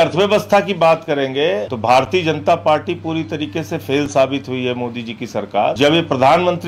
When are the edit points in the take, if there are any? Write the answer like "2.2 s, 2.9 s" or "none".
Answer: 1.7 s, 5.8 s